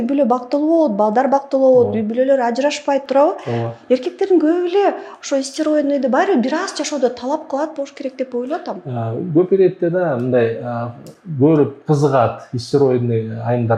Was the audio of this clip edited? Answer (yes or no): no